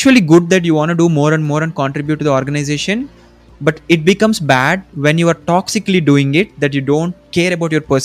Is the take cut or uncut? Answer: uncut